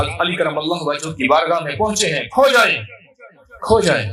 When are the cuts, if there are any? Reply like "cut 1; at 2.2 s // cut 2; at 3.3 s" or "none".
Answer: none